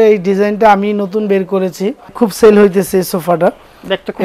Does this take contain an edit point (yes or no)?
yes